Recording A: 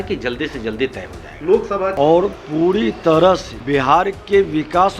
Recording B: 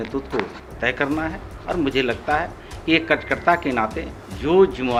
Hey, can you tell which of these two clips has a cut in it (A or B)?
A